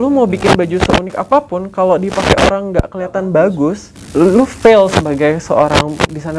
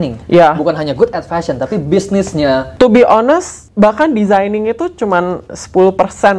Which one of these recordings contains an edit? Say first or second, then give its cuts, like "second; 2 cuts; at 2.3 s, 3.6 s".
second; 1 cut; at 2.7 s